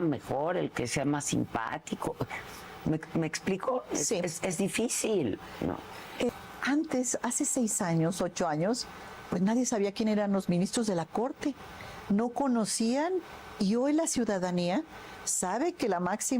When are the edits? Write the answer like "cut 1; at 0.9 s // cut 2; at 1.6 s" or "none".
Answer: cut 1; at 6.3 s